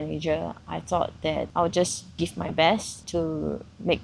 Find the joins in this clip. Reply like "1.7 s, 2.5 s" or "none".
1.5 s, 3.0 s